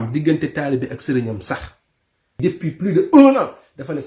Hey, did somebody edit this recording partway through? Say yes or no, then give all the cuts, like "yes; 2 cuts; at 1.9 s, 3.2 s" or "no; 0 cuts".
yes; 1 cut; at 2.4 s